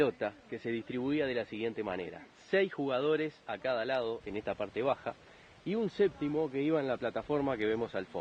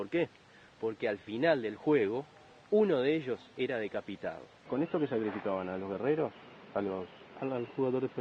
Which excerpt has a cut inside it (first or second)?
second